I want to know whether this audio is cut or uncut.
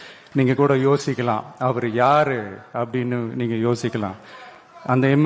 uncut